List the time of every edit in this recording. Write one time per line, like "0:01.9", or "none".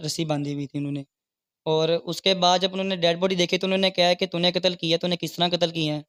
none